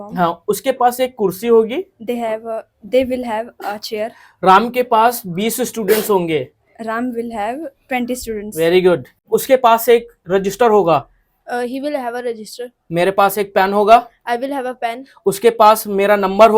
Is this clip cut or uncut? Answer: cut